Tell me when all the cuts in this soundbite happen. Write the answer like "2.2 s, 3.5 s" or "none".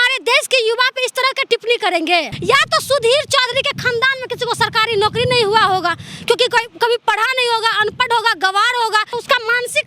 2.3 s, 9.1 s